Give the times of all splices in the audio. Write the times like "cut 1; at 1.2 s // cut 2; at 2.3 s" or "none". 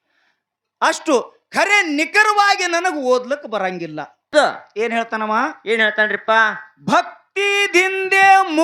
cut 1; at 4.3 s